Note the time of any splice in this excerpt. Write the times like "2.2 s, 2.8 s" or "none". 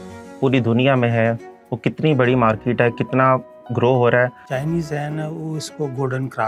4.5 s